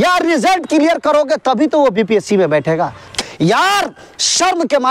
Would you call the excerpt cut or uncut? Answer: cut